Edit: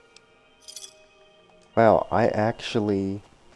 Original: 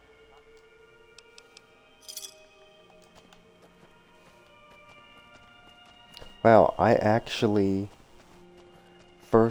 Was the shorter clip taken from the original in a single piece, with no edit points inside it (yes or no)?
no